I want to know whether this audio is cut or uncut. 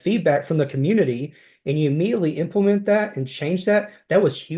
uncut